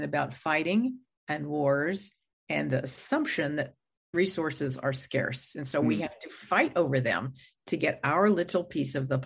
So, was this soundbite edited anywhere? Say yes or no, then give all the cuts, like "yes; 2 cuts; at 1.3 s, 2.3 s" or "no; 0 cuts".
no; 0 cuts